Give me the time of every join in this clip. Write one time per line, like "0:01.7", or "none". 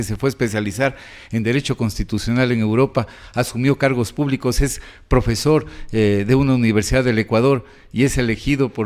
none